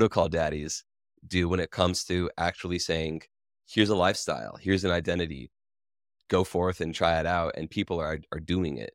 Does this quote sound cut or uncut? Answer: uncut